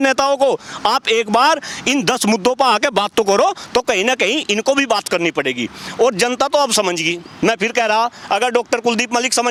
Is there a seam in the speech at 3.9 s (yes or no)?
no